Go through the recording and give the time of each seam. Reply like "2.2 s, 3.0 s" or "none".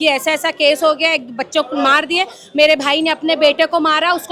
none